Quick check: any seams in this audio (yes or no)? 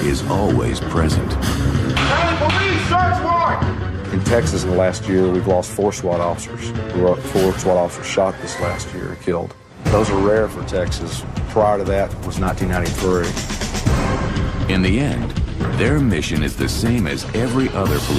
yes